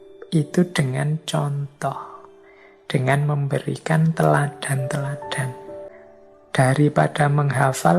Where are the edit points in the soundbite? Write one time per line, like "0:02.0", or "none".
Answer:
0:05.9